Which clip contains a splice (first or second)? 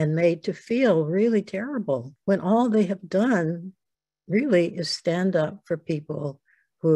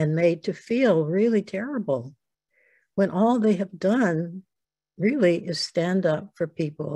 first